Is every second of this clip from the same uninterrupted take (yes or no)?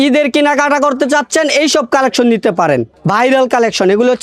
no